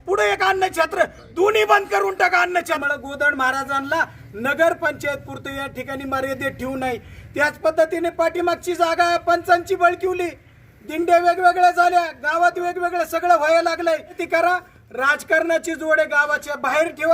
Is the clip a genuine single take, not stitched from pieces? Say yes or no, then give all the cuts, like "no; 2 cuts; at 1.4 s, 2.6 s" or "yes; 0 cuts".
no; 2 cuts; at 2.8 s, 14.2 s